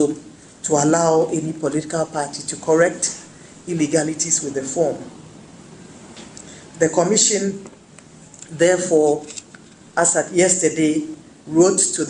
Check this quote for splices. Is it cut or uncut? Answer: uncut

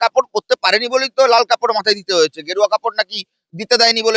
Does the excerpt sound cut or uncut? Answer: uncut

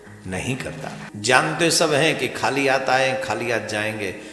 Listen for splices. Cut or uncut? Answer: cut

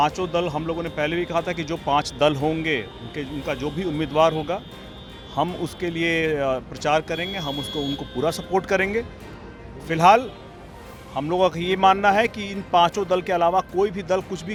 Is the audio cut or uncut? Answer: uncut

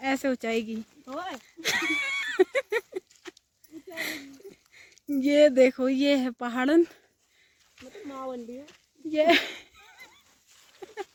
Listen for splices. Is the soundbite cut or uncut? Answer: uncut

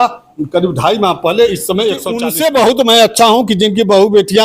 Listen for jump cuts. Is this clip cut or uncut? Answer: cut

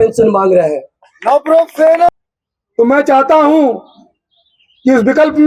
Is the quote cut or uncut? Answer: cut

